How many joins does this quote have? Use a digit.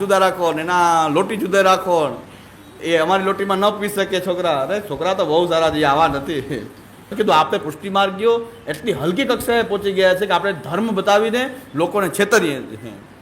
1